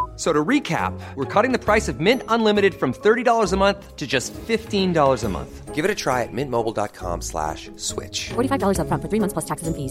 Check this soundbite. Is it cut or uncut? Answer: uncut